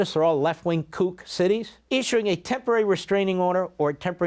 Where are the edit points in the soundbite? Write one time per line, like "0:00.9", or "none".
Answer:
0:01.7